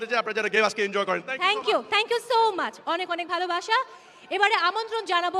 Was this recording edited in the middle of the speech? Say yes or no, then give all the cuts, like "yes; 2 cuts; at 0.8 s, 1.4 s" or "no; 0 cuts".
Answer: no; 0 cuts